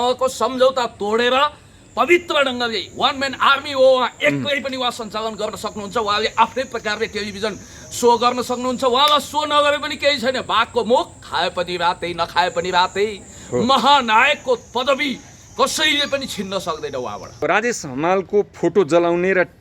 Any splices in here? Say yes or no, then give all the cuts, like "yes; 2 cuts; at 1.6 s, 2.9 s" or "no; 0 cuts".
yes; 1 cut; at 17.4 s